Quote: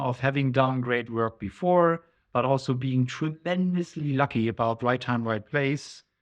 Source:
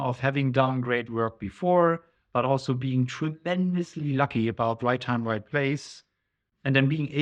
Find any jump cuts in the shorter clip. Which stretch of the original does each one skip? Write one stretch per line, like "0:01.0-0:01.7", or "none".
none